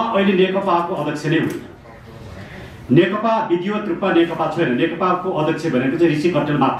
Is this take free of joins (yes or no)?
yes